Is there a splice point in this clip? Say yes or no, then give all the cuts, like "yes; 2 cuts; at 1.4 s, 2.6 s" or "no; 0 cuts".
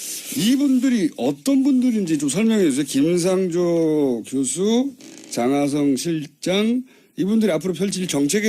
yes; 1 cut; at 7.1 s